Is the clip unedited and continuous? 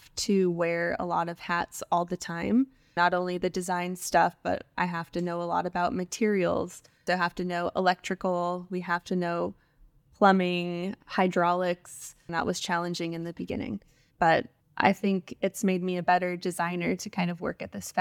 yes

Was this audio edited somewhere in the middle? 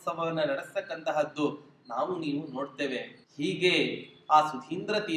yes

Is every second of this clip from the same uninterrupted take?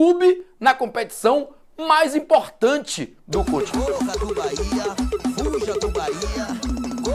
no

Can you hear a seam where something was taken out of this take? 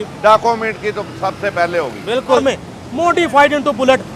yes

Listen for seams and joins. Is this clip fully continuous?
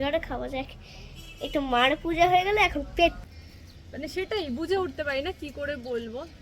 no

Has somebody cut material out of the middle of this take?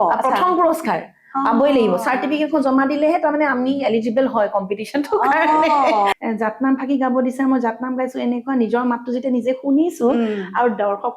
yes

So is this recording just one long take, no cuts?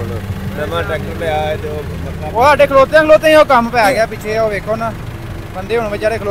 yes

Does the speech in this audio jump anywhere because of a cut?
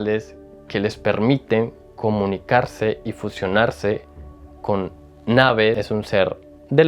yes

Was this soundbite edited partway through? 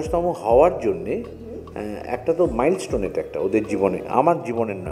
no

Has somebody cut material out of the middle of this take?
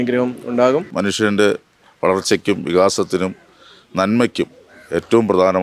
yes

